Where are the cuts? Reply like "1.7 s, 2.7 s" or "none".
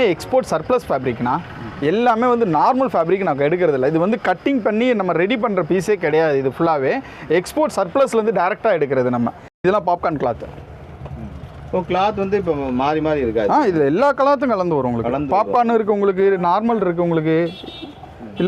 9.6 s